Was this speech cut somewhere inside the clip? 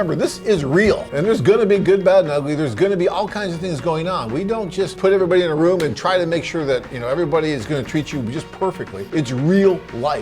yes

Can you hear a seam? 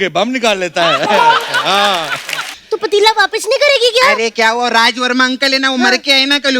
yes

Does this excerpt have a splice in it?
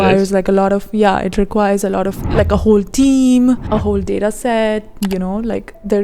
yes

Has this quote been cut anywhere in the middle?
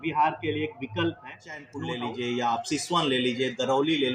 yes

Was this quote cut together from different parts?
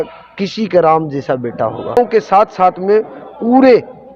yes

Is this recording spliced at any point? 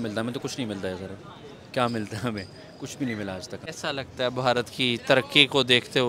yes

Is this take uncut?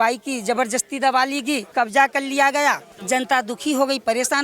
no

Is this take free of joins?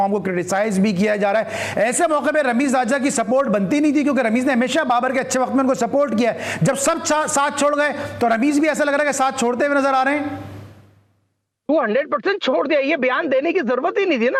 yes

